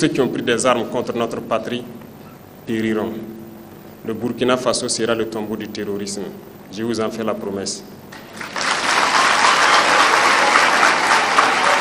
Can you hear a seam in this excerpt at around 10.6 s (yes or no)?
no